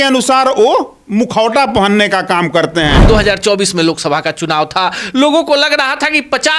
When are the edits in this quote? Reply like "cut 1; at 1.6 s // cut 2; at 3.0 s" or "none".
cut 1; at 1.0 s // cut 2; at 3.0 s